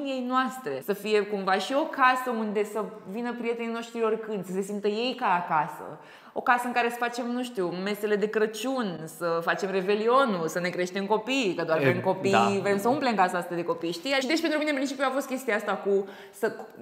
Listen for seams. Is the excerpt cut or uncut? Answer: uncut